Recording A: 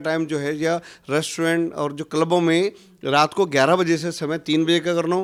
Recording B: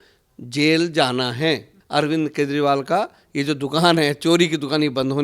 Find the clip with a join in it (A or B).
B